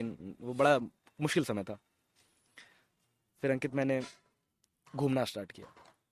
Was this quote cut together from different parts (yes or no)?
no